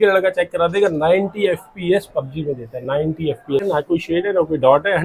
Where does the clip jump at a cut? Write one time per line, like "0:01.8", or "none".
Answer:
0:03.6